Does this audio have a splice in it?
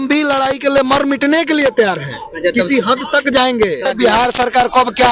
yes; 1 cut; at 3.9 s

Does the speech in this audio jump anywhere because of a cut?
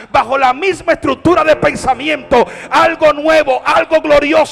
no; 0 cuts

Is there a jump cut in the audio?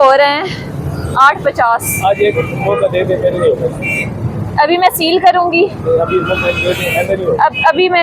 no; 0 cuts

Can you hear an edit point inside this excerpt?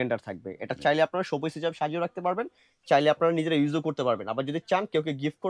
no; 0 cuts

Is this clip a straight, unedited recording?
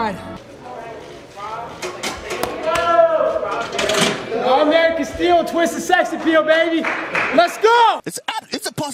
yes; 0 cuts

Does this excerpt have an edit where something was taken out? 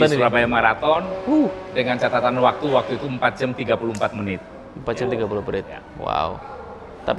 no; 0 cuts

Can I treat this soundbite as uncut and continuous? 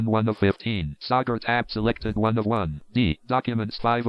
no; 1 cut; at 3.2 s

